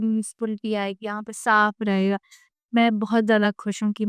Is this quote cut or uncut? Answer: uncut